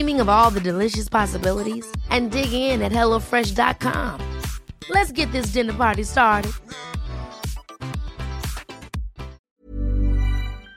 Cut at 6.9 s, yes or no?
no